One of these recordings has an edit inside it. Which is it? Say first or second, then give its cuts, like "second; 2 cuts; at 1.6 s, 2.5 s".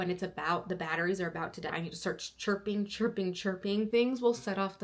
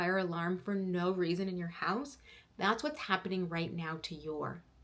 first; 1 cut; at 3.9 s